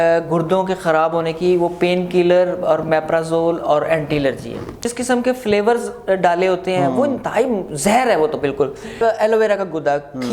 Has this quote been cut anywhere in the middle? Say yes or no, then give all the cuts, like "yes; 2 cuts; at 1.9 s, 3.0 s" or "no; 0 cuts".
yes; 2 cuts; at 4.9 s, 9.0 s